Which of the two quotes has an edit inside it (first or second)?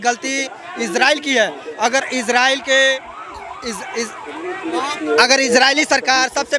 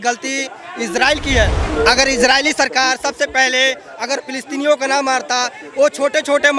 second